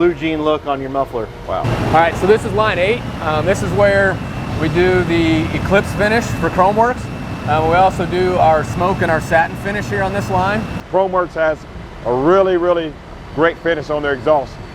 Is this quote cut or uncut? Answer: cut